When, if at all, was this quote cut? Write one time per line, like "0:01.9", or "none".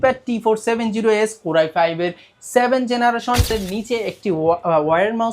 0:03.5